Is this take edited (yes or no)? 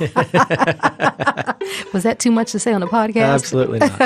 no